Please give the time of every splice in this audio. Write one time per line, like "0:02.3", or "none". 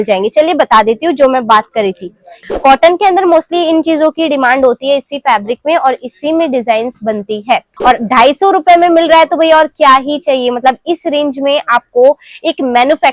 0:02.4
0:07.7

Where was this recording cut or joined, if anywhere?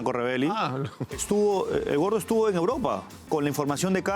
0:03.2

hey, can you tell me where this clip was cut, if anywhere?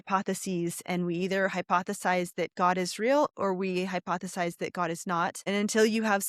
0:05.4

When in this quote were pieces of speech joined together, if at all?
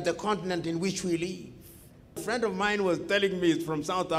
0:02.2

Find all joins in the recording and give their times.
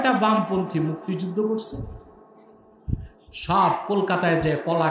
none

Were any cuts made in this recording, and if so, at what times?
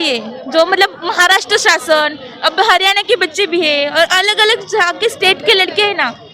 none

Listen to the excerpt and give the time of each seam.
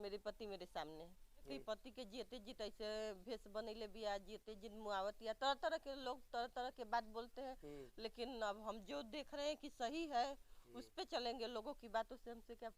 0:01.4

